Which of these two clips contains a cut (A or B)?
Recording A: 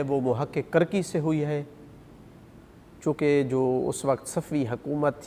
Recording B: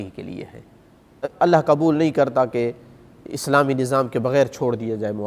B